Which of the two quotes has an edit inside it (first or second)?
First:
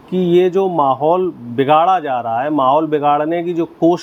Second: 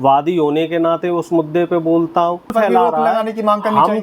second